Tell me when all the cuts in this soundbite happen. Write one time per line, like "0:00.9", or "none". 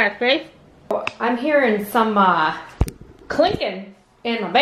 0:00.9